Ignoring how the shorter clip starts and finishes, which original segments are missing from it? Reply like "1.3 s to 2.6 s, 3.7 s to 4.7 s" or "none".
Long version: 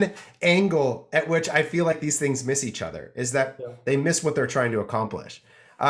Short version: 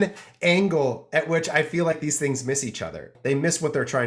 3.0 s to 3.7 s